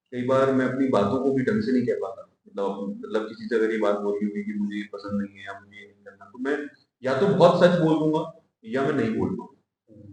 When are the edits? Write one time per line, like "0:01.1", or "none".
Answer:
none